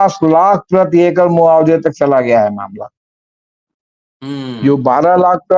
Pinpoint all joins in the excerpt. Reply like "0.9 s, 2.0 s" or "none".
none

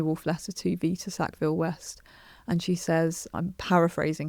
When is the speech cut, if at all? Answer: 3.3 s

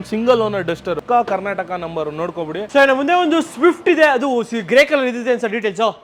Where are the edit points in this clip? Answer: none

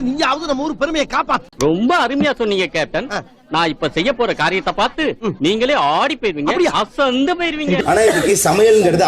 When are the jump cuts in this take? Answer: 7.8 s

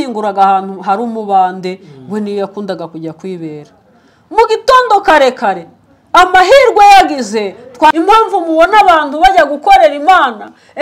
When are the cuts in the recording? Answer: 7.9 s

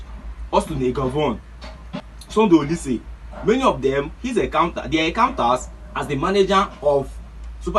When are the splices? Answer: 1.9 s

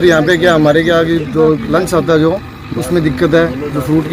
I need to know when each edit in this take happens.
none

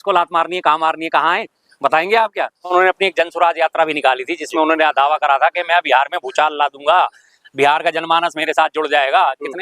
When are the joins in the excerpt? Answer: 2.7 s

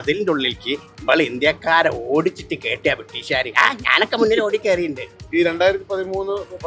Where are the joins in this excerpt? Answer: 5.2 s

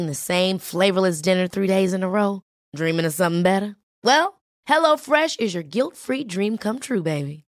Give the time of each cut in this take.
none

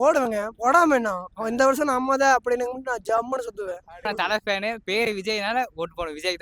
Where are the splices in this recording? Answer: 4.0 s

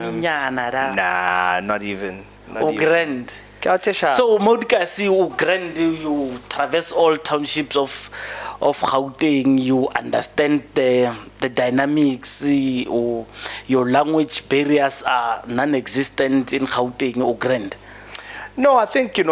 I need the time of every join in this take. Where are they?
none

